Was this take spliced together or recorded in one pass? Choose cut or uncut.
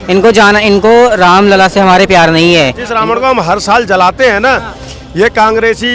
cut